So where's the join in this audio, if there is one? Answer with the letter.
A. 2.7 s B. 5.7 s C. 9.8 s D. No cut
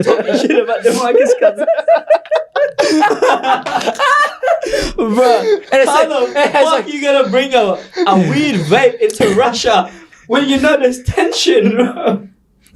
D